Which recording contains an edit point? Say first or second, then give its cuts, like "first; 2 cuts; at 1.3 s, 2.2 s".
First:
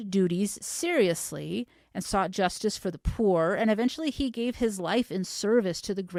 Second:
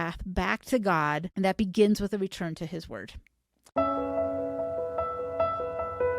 second; 2 cuts; at 1.3 s, 3.6 s